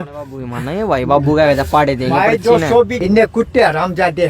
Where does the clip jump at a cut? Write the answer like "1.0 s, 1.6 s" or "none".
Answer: 3.0 s